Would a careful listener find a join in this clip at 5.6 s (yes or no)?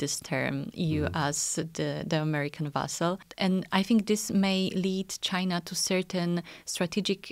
no